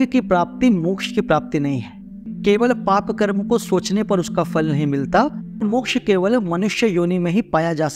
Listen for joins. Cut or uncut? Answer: cut